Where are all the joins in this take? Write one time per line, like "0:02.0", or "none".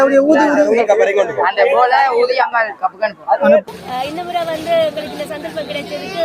0:03.6